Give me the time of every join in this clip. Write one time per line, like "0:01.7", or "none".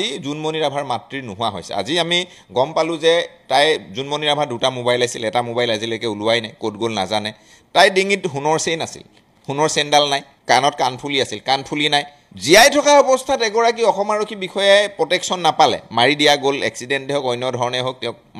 none

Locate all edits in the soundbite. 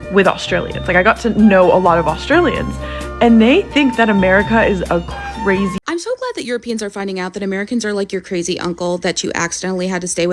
0:05.7

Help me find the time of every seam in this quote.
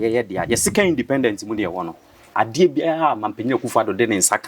0:02.3

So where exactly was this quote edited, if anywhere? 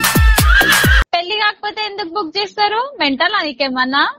0:01.0

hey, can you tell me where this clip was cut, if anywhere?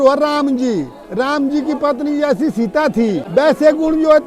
0:03.2

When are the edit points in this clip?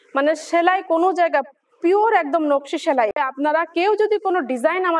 0:03.2

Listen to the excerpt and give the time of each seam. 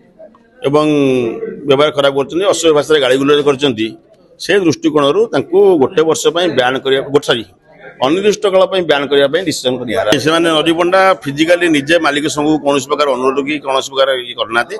0:10.1

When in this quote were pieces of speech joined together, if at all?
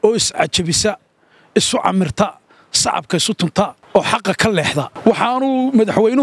0:03.8
0:04.9

